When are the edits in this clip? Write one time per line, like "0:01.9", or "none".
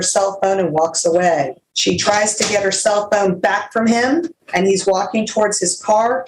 0:01.6
0:04.4

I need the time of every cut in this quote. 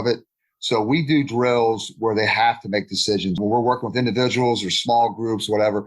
0:03.4

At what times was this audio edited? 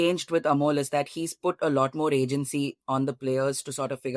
none

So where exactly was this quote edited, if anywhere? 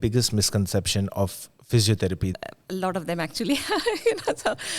0:02.3

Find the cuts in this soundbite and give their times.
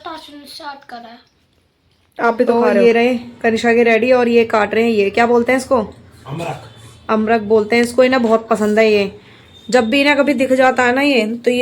0:02.5

